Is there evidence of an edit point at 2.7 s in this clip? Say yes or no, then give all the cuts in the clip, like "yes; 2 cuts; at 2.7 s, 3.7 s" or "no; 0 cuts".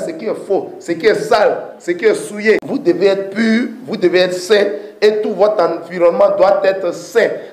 yes; 1 cut; at 2.7 s